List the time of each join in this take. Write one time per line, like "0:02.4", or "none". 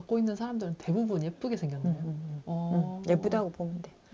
none